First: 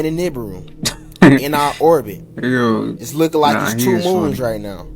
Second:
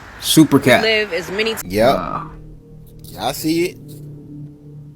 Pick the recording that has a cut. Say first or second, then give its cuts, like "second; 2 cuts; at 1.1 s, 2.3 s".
second; 1 cut; at 1.6 s